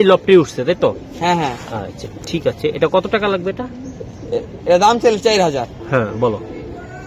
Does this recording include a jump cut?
no; 0 cuts

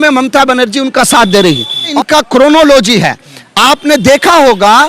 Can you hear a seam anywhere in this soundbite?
yes; 1 cut; at 1.9 s

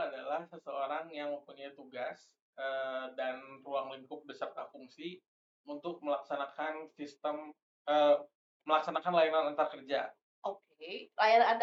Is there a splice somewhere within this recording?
no; 0 cuts

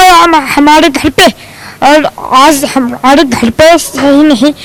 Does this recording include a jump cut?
no; 0 cuts

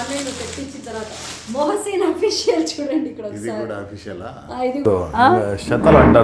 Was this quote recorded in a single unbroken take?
no; 1 cut; at 4.8 s

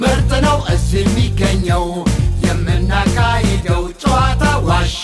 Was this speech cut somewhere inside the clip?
no; 0 cuts

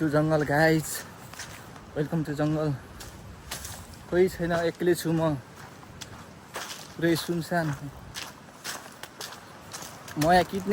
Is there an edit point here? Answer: no; 0 cuts

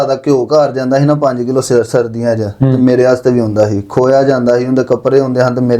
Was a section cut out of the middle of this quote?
no; 0 cuts

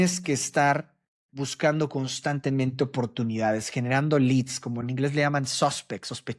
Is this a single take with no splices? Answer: yes; 0 cuts

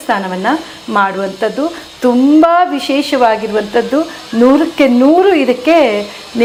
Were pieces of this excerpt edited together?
no; 0 cuts

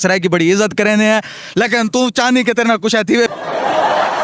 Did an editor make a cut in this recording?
yes; 1 cut; at 3.3 s

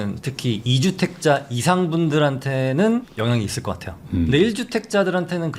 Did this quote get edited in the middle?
no; 0 cuts

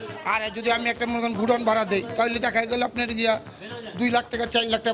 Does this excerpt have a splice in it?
no; 0 cuts

